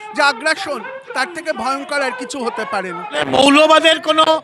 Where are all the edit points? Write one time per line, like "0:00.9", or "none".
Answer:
0:03.2